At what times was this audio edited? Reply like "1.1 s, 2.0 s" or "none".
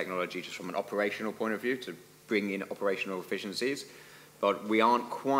none